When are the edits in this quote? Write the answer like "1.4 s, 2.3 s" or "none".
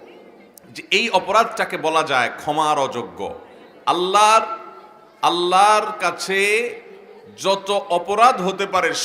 none